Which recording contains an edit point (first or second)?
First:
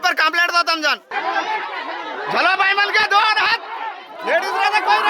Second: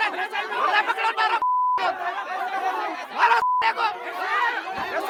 first